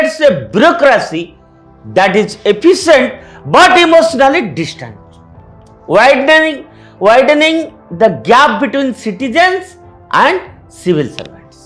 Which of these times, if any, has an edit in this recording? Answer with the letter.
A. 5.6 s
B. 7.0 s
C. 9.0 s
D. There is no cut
D